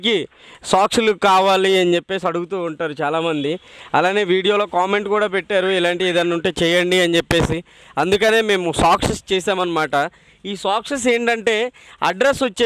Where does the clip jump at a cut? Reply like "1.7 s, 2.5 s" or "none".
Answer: none